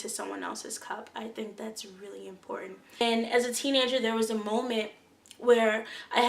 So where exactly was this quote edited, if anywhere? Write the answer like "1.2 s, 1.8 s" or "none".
3.0 s